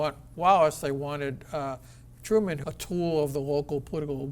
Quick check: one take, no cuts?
no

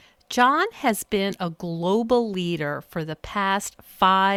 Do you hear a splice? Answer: no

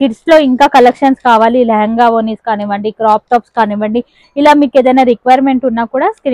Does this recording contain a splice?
no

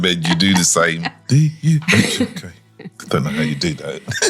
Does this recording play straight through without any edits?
no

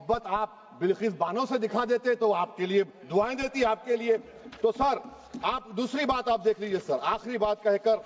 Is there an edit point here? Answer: no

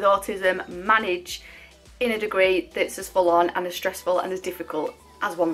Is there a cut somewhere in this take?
no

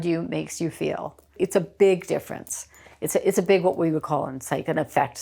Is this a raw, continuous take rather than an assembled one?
no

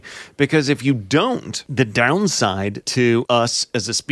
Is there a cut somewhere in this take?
yes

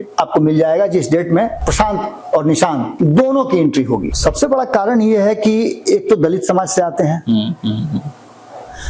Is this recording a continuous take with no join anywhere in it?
no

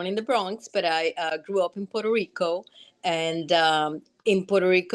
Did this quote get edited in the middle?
no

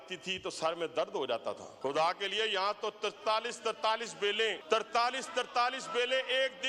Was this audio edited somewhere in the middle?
yes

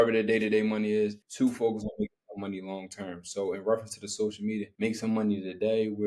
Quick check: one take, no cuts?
yes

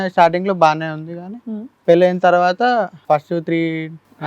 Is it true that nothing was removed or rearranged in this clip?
no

